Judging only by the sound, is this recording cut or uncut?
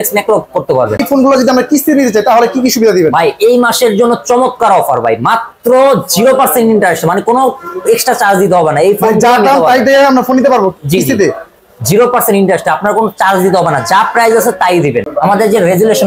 cut